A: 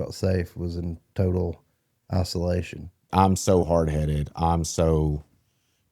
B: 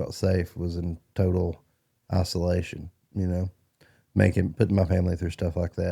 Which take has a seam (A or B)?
A